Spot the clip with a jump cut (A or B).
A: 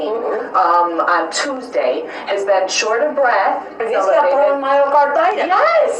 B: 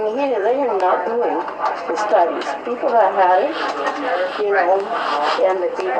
A